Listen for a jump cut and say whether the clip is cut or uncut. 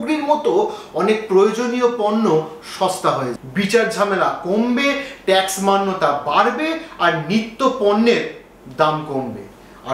cut